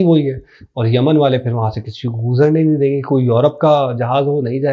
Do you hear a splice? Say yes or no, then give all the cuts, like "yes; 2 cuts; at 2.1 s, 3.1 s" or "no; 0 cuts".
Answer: no; 0 cuts